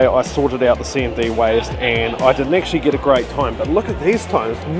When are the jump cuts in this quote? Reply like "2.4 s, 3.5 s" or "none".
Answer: none